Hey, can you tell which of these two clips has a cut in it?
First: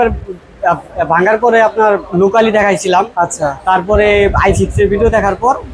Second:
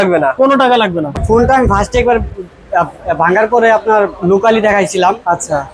second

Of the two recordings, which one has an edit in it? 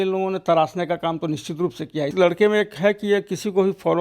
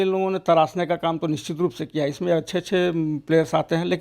first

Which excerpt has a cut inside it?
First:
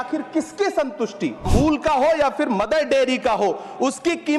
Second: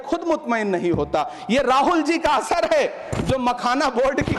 first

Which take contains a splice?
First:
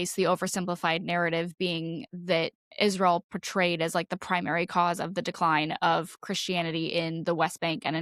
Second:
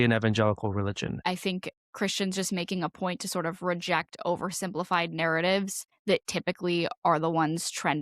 second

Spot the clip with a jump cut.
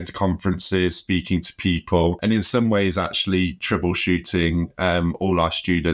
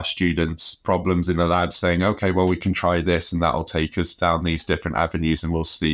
first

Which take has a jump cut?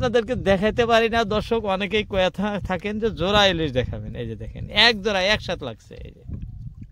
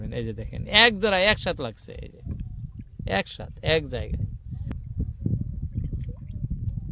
second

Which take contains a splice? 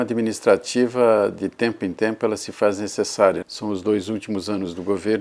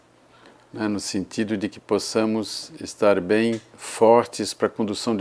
first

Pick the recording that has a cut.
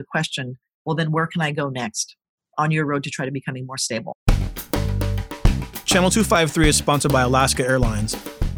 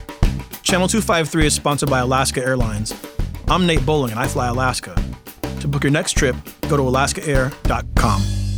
first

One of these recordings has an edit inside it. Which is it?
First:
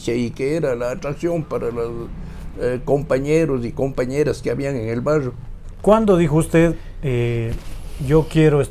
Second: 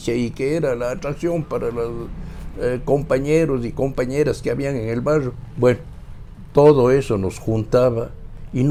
first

